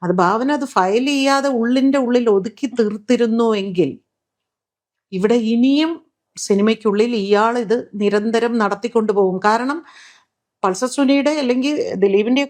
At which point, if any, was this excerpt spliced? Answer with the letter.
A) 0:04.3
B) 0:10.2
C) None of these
C